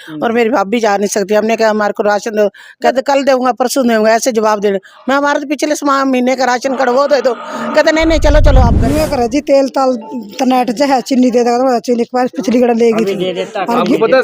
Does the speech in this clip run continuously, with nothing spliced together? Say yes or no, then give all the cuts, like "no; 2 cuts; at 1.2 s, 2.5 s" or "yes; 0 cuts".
no; 2 cuts; at 2.9 s, 8.8 s